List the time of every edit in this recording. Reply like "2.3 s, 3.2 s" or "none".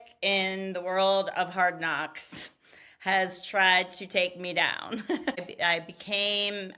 5.4 s